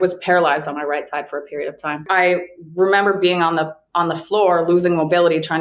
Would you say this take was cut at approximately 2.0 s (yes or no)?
yes